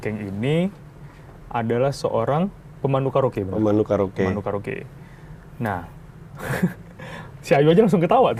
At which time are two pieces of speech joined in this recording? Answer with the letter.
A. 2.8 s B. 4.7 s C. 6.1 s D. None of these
D